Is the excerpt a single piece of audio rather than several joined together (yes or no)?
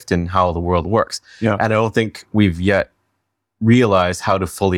yes